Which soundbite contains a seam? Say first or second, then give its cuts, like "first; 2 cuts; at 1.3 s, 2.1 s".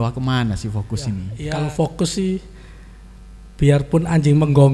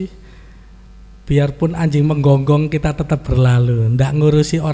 first; 1 cut; at 1.4 s